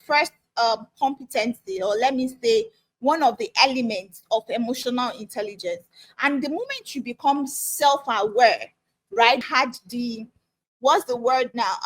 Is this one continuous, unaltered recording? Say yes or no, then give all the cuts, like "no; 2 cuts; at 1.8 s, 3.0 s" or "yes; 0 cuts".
no; 1 cut; at 9.4 s